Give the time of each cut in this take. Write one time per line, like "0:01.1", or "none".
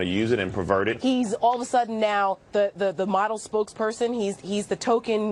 0:01.0